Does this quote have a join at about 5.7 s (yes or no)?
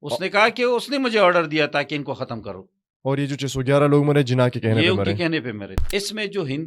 yes